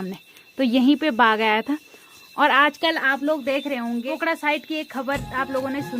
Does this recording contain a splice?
no; 0 cuts

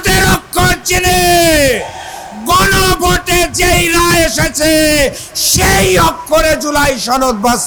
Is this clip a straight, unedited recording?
yes; 0 cuts

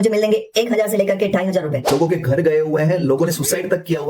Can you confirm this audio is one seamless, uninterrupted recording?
no; 1 cut; at 1.9 s

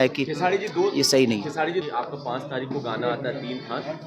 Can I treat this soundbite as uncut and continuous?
no; 1 cut; at 1.8 s

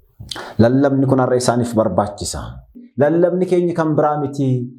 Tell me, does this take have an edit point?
yes; 1 cut; at 2.8 s

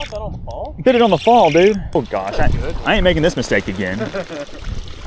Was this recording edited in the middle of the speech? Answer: yes; 1 cut; at 2.0 s

